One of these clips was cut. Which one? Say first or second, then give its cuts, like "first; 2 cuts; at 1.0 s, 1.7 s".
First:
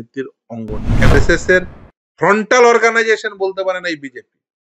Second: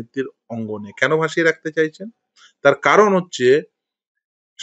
first; 1 cut; at 1.1 s